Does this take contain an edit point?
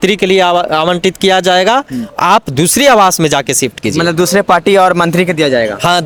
no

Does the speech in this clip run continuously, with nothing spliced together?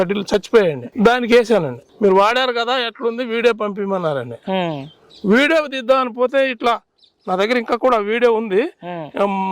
no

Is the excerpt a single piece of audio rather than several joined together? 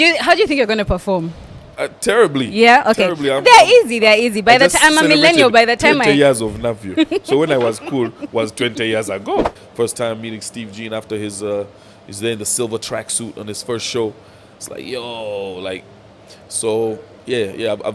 no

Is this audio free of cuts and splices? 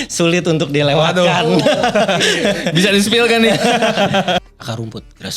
no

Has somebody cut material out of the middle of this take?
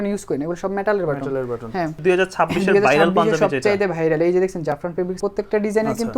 yes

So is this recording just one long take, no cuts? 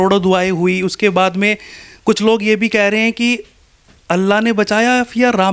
yes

